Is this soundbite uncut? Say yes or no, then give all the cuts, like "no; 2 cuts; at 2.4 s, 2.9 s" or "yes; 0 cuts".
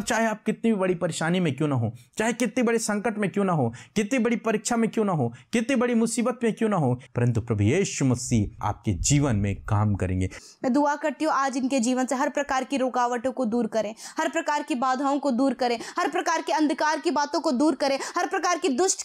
no; 3 cuts; at 7.0 s, 8.6 s, 10.4 s